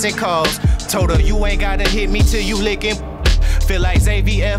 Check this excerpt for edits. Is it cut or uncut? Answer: uncut